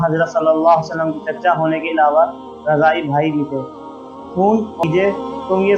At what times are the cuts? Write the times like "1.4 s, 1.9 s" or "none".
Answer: 4.8 s